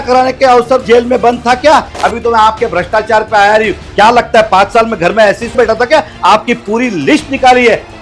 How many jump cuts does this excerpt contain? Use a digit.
3